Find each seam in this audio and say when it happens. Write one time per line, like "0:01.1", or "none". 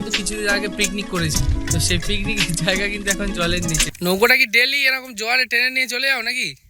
0:01.3
0:03.9